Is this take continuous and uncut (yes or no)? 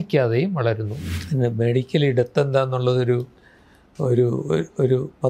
no